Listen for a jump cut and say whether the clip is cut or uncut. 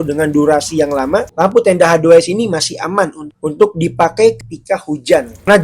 cut